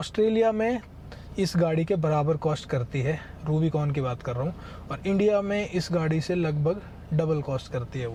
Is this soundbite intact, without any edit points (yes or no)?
yes